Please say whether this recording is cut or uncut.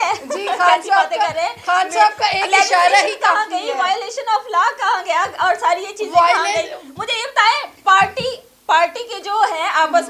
uncut